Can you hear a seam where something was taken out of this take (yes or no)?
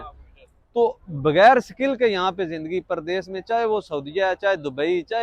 yes